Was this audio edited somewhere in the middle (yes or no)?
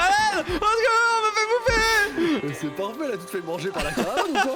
no